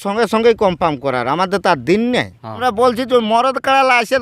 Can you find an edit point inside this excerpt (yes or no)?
yes